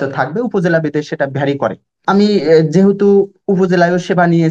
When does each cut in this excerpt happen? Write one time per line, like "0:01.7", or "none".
0:02.0